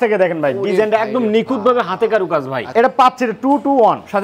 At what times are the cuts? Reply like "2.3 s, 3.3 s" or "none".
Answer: 2.6 s

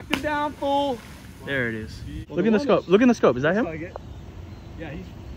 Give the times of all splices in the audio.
none

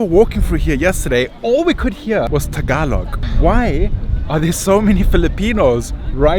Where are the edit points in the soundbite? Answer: 2.3 s, 3.3 s

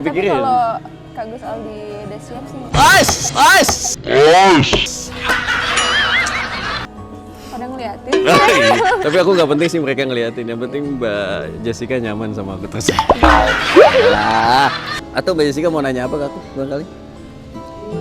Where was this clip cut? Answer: 6.8 s, 9.0 s, 14.9 s

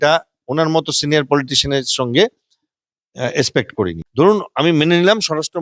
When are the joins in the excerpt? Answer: 4.0 s

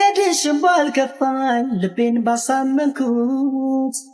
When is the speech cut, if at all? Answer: none

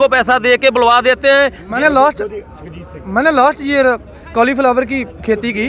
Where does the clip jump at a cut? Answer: 1.6 s

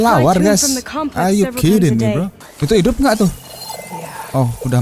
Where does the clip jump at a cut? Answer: 2.4 s

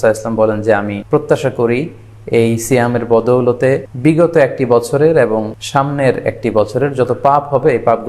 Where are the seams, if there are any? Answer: 1.0 s, 3.9 s, 5.6 s

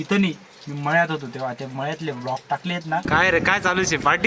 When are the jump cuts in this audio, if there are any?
3.0 s

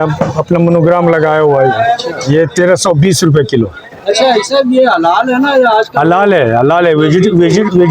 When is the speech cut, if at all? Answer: none

